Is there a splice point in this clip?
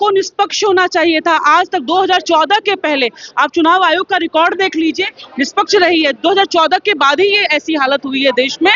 no; 0 cuts

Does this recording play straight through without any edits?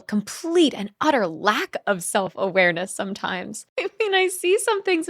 no; 1 cut; at 3.7 s

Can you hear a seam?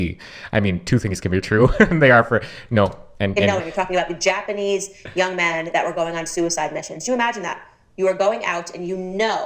no; 0 cuts

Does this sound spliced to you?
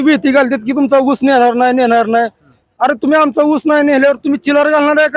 no; 0 cuts

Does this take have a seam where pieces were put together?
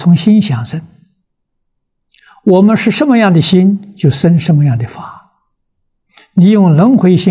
no; 0 cuts

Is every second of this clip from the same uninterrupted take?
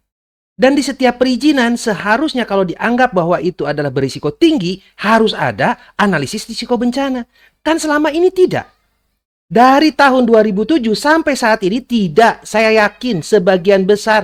yes; 0 cuts

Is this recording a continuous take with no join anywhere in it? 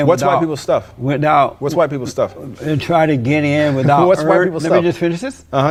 yes; 0 cuts

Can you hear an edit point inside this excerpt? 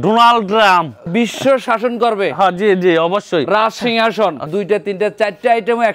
yes; 2 cuts; at 1.1 s, 4.4 s

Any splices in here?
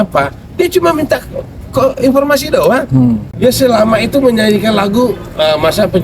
yes; 1 cut; at 3.3 s

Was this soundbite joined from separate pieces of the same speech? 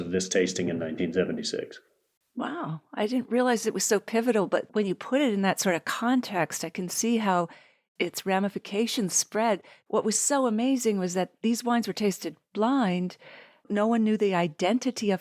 yes; 1 cut; at 9.7 s

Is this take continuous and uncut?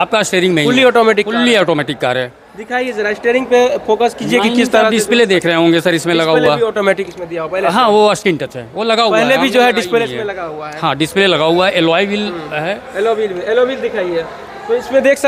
yes; 0 cuts

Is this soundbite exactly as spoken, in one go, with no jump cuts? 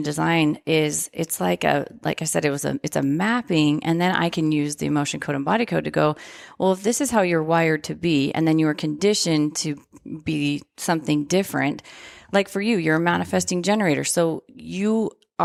yes; 0 cuts

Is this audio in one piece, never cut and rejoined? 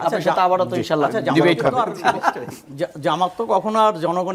yes; 0 cuts

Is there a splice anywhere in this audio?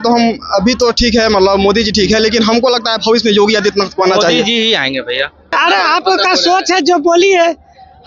yes; 1 cut; at 5.5 s

